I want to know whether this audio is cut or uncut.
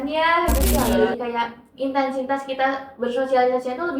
cut